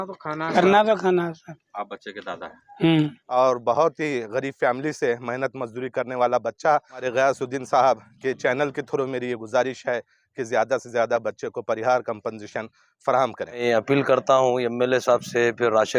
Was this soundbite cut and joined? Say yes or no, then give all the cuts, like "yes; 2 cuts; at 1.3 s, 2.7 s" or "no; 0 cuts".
yes; 4 cuts; at 1.5 s, 3.2 s, 7.1 s, 13.6 s